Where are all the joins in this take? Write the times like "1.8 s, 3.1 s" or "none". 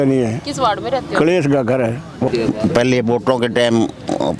2.3 s